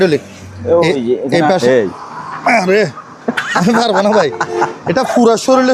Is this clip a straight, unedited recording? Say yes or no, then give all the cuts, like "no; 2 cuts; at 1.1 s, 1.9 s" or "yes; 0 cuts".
no; 1 cut; at 1.6 s